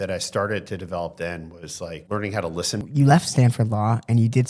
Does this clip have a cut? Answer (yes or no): yes